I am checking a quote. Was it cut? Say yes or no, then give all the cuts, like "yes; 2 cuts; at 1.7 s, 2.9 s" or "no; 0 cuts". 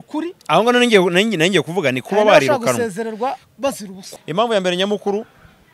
yes; 1 cut; at 4.0 s